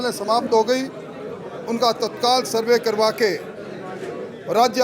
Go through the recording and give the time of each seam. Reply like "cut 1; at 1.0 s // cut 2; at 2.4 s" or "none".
none